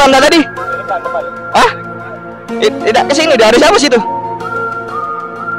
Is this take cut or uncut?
uncut